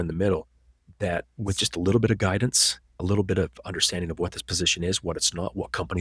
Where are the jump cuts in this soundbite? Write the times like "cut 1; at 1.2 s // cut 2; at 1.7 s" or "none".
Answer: cut 1; at 3.0 s